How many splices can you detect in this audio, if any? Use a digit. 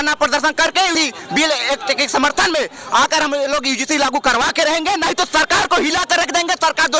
1